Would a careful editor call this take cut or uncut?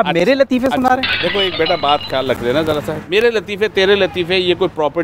uncut